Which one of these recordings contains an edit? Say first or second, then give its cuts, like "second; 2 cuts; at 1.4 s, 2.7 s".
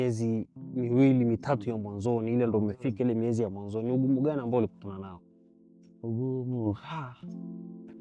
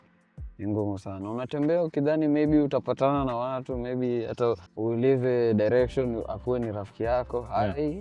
second; 1 cut; at 4.7 s